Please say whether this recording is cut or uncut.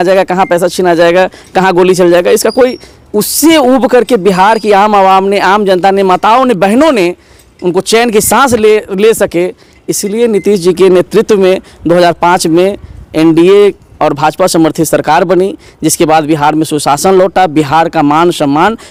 uncut